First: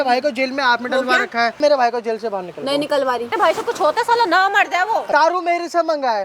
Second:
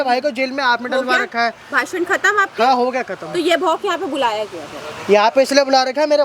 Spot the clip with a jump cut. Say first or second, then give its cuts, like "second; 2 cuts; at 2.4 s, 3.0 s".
first; 3 cuts; at 1.6 s, 3.3 s, 5.1 s